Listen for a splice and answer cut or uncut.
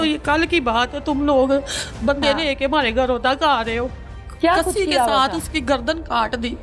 cut